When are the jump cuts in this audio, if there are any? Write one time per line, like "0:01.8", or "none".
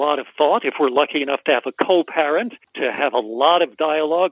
0:02.6